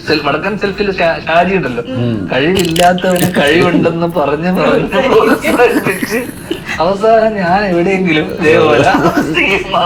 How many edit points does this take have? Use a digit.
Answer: 0